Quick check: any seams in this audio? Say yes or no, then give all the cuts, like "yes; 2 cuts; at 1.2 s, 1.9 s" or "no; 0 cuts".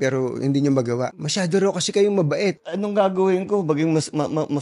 yes; 2 cuts; at 1.2 s, 2.7 s